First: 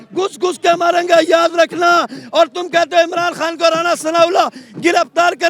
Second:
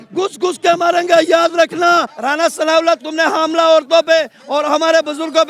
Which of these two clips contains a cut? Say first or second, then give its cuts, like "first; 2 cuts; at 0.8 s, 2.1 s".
second; 1 cut; at 2.1 s